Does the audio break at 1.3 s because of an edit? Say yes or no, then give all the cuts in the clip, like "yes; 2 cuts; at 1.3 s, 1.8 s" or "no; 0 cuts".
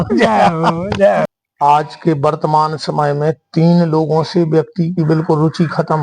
yes; 1 cut; at 1.3 s